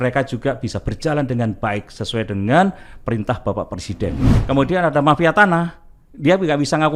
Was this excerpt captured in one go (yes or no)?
no